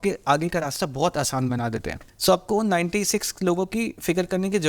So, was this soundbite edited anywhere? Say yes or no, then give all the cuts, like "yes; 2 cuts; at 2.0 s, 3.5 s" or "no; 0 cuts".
yes; 1 cut; at 2.1 s